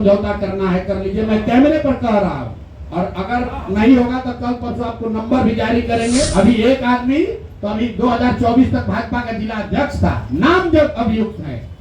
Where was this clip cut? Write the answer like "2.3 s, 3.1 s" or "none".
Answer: 6.3 s

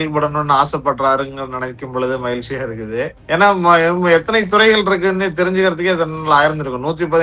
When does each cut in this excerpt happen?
3.2 s

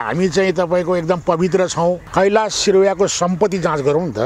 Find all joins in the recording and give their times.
2.0 s

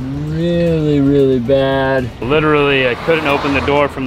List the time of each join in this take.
2.2 s

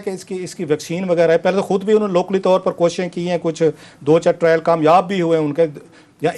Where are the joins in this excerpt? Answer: none

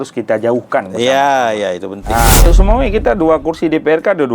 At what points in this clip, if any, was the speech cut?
2.5 s

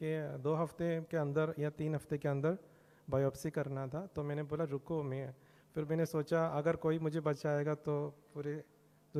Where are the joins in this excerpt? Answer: none

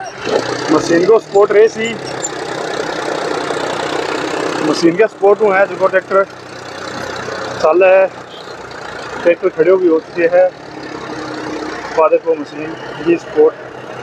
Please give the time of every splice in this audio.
none

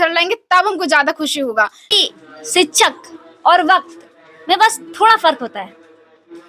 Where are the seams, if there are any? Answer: 1.9 s

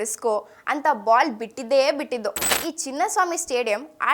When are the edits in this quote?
2.5 s

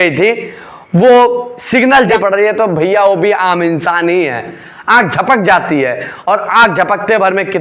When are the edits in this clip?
2.1 s

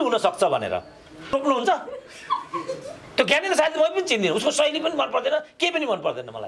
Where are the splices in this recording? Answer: 1.3 s

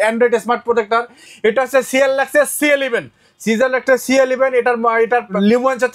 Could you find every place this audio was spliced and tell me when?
1.2 s

